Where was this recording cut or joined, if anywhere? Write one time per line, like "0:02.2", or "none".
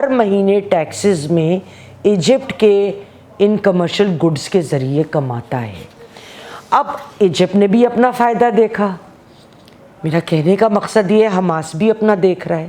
none

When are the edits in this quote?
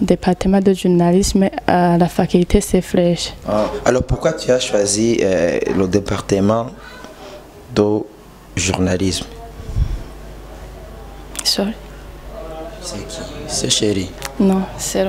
0:03.3

